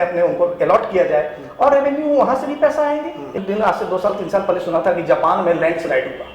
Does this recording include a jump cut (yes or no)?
yes